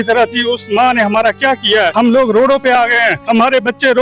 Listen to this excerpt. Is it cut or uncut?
cut